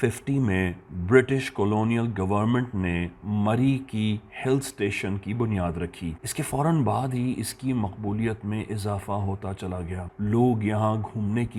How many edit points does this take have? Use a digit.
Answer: 0